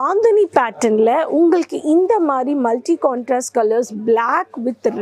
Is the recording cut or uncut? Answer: uncut